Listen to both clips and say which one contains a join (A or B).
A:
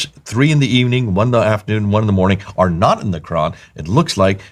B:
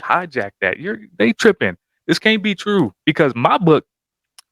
B